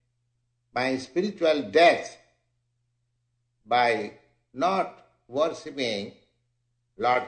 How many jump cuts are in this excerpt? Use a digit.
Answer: 1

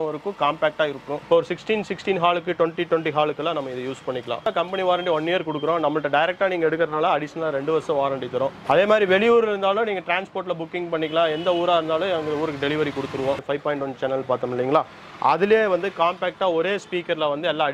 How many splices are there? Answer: 4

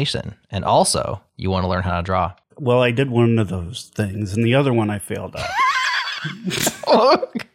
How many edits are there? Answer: 2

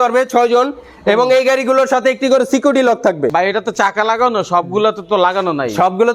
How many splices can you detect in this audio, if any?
1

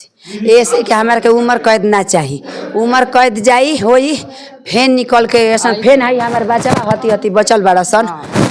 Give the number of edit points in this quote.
0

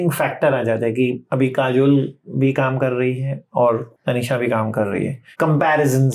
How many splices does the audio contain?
3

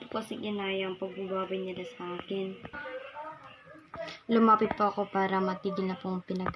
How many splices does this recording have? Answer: 1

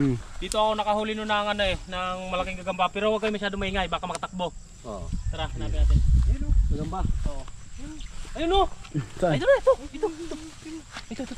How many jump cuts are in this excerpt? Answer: 0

